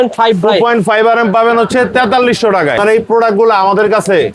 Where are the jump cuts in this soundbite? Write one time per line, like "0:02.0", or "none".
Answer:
0:03.0

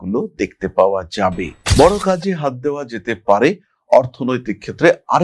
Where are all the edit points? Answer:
0:01.6

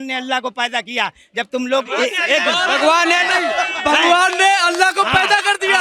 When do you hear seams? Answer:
none

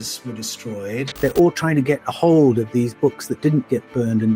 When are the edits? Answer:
0:01.1

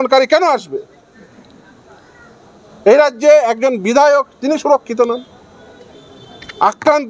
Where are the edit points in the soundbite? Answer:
none

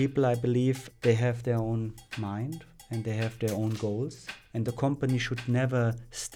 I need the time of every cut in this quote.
0:00.9
0:02.0
0:03.0
0:04.6

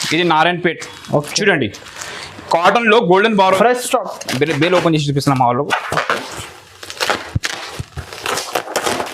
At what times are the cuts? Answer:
0:03.4

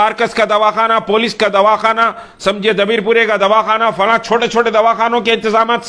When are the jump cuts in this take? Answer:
none

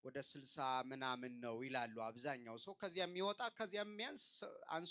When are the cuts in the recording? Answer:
none

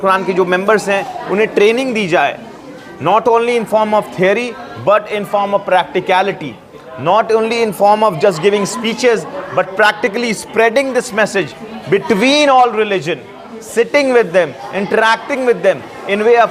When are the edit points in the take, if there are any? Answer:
none

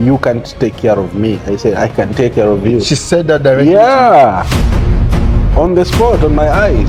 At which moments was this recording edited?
none

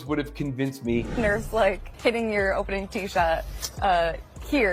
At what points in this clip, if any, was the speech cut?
0:01.4

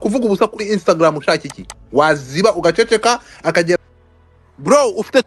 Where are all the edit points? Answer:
0:03.7

